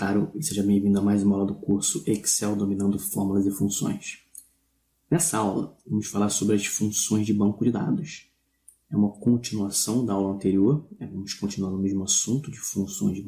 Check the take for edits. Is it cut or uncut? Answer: uncut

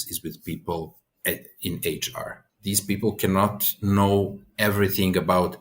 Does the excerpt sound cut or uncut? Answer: cut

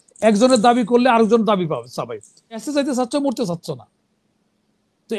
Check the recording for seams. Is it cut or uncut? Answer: cut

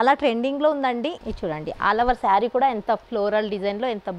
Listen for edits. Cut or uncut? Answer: cut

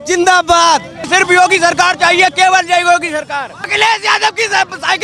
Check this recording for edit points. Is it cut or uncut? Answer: cut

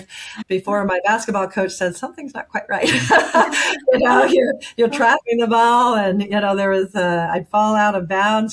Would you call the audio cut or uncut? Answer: uncut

